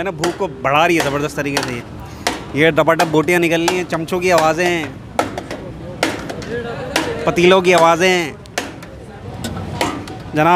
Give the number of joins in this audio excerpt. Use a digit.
1